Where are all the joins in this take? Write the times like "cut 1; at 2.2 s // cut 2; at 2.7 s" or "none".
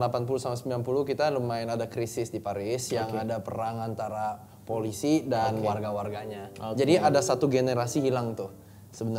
none